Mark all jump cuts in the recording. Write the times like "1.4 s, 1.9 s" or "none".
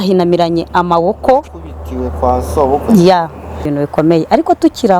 3.7 s